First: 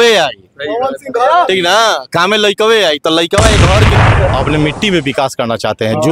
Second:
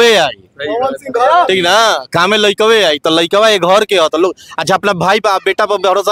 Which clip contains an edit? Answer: first; 1 cut; at 3.9 s

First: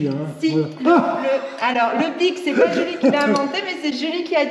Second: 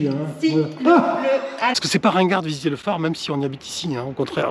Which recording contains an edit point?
second; 1 cut; at 1.7 s

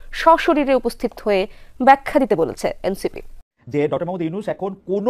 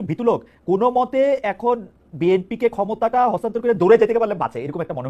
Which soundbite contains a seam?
first; 1 cut; at 3.6 s

